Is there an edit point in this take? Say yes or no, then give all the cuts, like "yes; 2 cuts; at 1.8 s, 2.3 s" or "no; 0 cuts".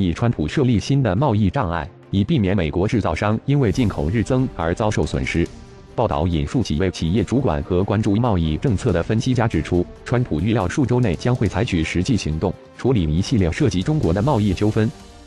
yes; 1 cut; at 14.1 s